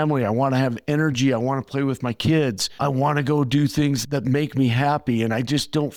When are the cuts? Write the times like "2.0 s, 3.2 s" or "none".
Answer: none

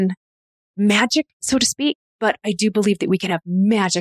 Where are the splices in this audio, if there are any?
2.1 s

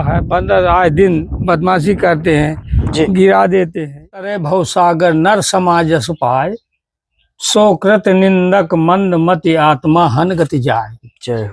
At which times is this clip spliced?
4.3 s

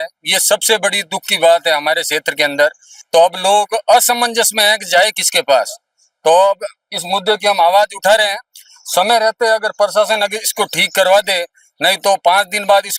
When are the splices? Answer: none

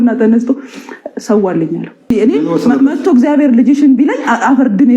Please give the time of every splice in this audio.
2.1 s

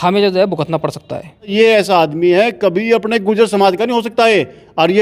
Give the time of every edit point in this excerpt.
1.5 s

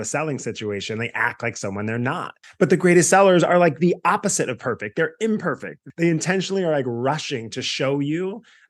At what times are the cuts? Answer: 2.4 s, 5.8 s

